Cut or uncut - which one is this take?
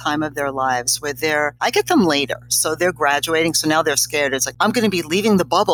cut